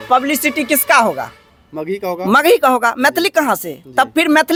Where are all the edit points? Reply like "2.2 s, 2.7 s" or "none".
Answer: none